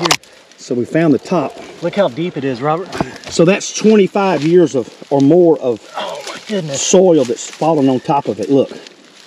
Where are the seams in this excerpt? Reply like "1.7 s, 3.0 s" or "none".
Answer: none